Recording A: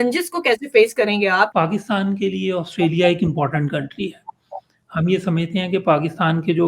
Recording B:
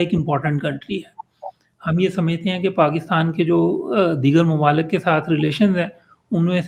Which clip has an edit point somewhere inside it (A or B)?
A